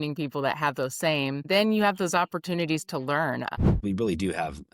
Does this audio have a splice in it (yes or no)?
yes